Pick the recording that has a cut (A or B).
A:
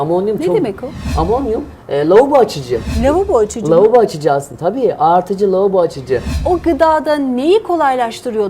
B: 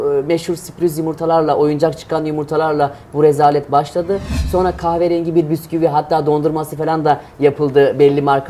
A